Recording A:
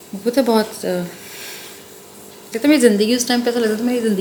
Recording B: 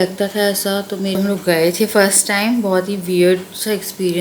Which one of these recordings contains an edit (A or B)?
B